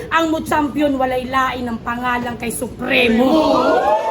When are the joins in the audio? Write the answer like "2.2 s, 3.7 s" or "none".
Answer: none